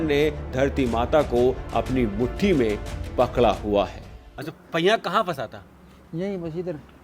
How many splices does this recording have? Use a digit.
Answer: 1